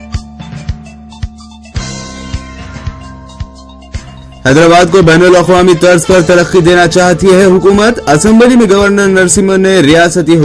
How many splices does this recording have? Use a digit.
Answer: 1